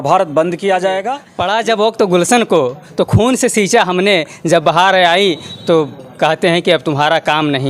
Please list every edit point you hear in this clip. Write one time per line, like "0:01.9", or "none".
0:01.2